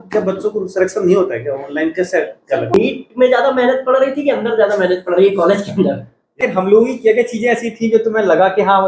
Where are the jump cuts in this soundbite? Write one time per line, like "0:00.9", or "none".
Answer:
0:02.8
0:06.4